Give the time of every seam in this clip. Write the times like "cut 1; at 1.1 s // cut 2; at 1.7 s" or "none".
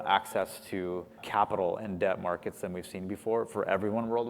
cut 1; at 1.2 s